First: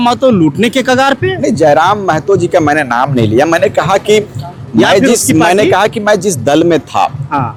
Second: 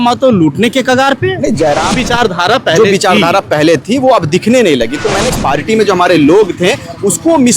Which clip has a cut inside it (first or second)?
second